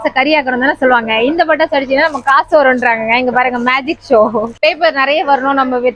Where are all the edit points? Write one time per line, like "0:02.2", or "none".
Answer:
0:04.5